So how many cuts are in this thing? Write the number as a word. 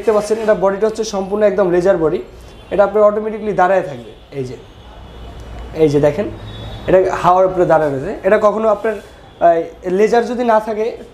zero